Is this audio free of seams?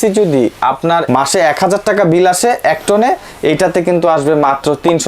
yes; 0 cuts

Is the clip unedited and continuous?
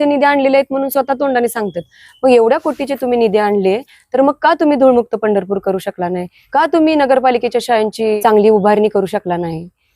no; 2 cuts; at 6.3 s, 8.2 s

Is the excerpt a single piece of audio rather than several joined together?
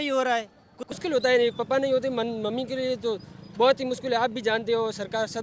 no; 1 cut; at 0.9 s

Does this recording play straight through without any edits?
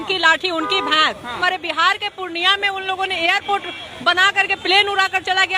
no; 1 cut; at 1.4 s

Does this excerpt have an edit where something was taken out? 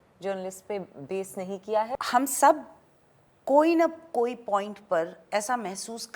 yes; 1 cut; at 2.0 s

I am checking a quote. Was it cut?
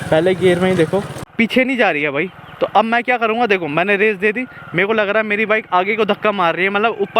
yes; 1 cut; at 1.3 s

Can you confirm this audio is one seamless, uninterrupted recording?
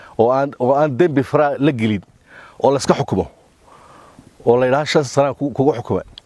yes; 0 cuts

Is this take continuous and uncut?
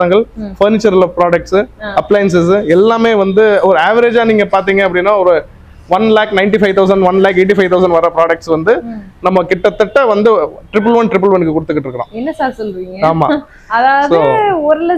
yes; 0 cuts

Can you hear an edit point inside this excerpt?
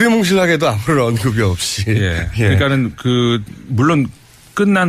no; 0 cuts

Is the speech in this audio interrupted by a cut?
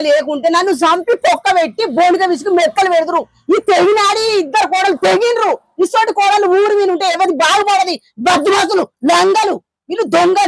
no; 0 cuts

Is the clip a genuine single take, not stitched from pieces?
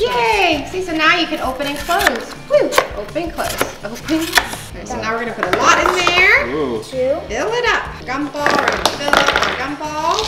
no; 2 cuts; at 4.6 s, 8.0 s

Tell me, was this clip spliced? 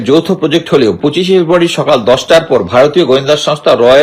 yes; 1 cut; at 1.0 s

